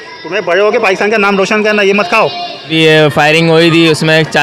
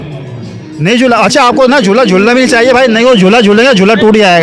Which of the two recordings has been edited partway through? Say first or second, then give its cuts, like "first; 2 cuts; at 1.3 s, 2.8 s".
first; 1 cut; at 2.7 s